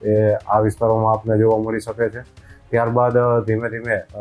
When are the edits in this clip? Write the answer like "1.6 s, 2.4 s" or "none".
none